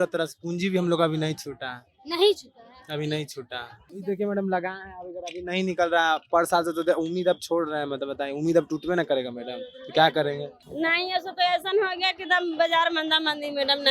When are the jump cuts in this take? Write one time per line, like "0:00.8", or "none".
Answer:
0:03.9
0:10.6